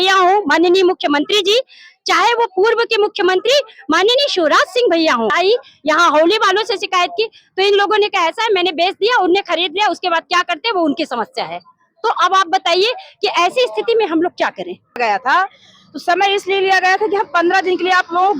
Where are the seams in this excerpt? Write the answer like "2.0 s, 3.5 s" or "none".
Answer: 5.3 s, 15.0 s